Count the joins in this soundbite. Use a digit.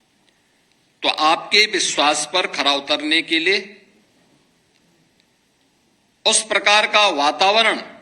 1